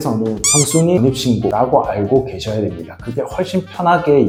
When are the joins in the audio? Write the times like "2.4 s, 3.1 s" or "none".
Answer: none